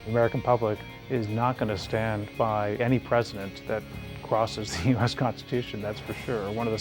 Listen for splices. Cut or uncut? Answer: cut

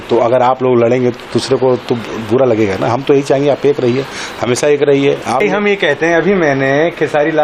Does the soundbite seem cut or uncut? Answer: cut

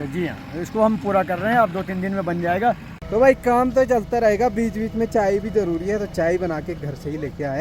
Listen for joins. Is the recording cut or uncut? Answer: cut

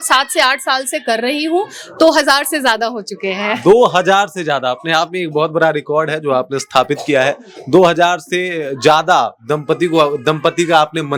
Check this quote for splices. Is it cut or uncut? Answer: uncut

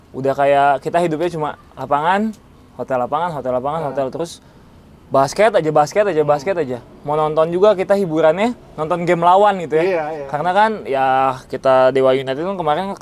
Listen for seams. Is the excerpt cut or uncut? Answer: uncut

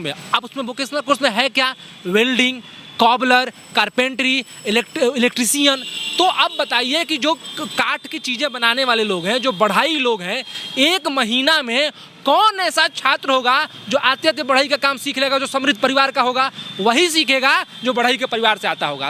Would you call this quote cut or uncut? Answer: uncut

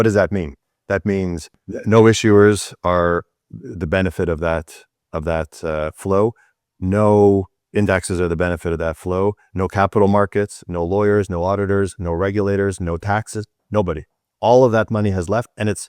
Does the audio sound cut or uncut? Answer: cut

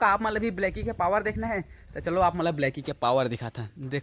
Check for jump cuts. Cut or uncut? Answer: uncut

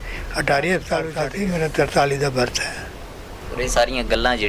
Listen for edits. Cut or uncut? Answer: cut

